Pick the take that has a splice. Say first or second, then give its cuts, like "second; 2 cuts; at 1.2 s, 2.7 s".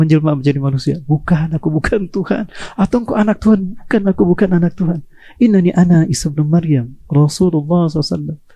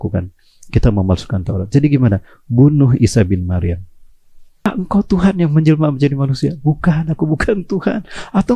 second; 1 cut; at 4.7 s